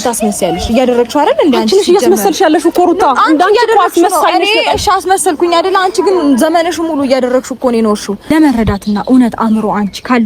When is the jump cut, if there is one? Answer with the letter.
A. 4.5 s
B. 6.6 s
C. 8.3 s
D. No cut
C